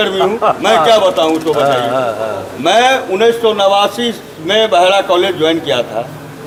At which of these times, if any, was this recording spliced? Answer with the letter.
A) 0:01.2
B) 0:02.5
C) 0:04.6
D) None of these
D